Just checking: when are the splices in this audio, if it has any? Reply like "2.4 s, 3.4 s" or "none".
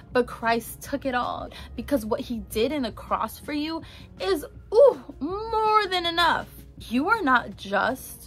1.6 s, 6.5 s

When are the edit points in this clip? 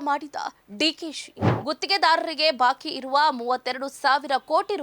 1.5 s

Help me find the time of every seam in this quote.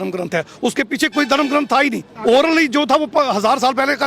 2.1 s

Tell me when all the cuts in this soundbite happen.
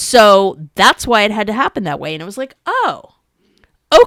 none

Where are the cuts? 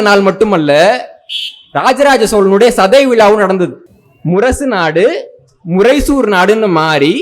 3.9 s

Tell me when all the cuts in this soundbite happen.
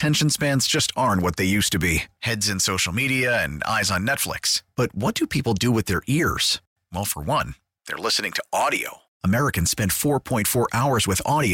none

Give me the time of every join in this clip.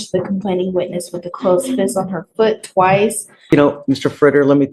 3.3 s

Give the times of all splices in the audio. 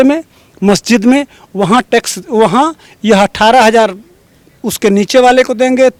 none

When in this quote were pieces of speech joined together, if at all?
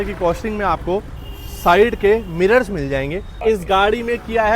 3.4 s

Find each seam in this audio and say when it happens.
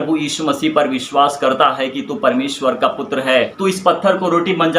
3.5 s

